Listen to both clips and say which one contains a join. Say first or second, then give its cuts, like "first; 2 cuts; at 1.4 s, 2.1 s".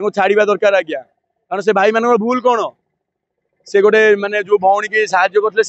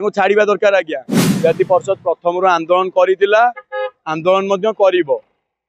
second; 1 cut; at 1.2 s